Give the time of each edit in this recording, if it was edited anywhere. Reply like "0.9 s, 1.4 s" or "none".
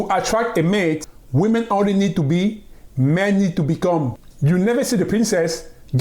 1.0 s, 4.2 s